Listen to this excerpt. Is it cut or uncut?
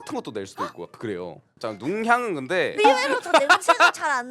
cut